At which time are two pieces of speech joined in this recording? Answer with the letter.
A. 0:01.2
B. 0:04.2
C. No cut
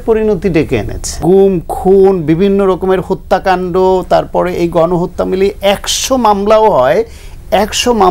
A